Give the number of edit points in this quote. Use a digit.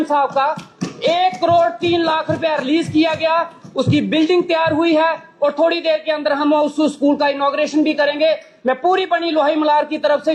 0